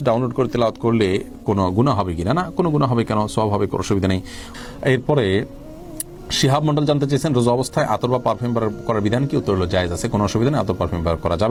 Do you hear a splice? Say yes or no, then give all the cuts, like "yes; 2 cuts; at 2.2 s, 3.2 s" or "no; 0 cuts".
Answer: no; 0 cuts